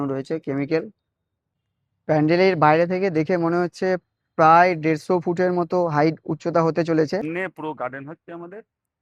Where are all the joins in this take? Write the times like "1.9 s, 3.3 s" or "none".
1.7 s, 7.3 s